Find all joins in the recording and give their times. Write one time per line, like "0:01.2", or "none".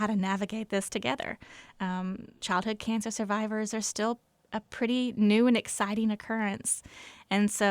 0:02.4